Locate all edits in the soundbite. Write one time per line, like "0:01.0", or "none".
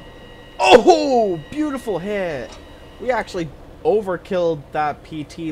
none